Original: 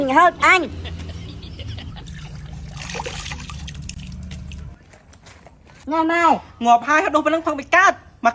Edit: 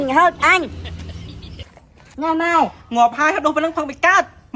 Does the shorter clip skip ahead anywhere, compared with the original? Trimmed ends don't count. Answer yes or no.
yes